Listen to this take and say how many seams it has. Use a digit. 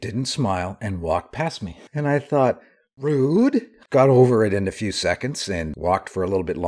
1